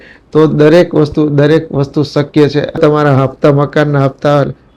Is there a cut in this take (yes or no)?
yes